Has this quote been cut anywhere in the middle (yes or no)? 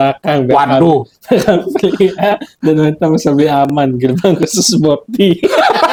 no